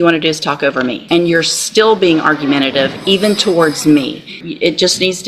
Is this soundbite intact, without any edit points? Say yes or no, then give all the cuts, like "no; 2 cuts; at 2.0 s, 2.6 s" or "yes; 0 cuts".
no; 2 cuts; at 1.0 s, 4.4 s